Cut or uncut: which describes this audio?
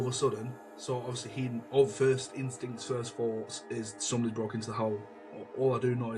cut